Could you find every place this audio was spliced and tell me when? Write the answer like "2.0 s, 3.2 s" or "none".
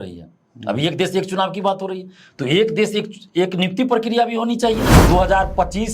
4.9 s